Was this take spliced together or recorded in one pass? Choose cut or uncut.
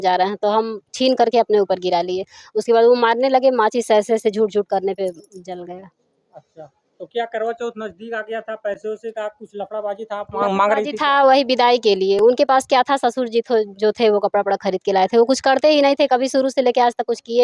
uncut